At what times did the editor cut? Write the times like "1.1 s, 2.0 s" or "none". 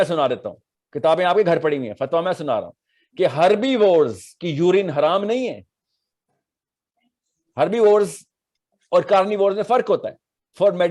none